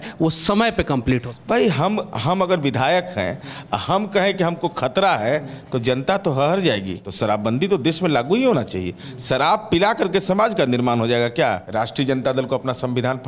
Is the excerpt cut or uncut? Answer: cut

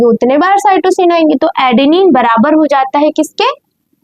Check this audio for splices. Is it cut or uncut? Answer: uncut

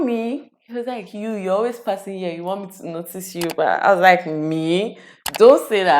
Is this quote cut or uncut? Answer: uncut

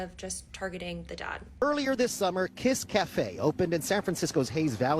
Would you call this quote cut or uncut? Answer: cut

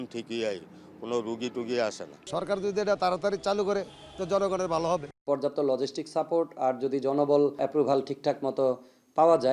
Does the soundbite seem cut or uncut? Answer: cut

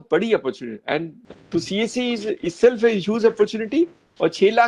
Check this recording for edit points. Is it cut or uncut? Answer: cut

